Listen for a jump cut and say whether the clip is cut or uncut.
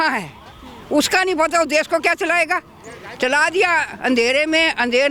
uncut